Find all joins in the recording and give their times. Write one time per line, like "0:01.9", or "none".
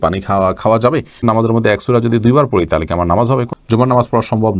0:01.2
0:03.5